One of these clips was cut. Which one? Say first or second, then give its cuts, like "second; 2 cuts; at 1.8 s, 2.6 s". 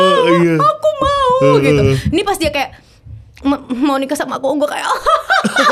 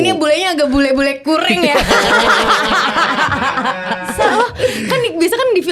second; 1 cut; at 4.2 s